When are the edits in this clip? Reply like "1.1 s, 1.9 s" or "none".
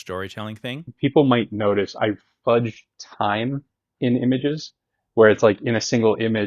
0.9 s